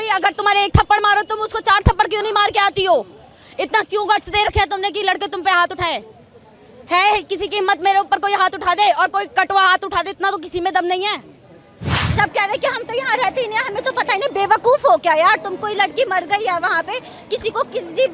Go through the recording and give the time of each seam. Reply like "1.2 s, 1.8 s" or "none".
12.0 s